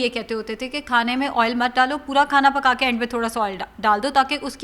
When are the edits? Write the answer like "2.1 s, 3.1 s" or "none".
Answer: none